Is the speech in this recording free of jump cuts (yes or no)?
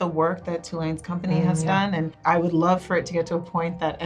no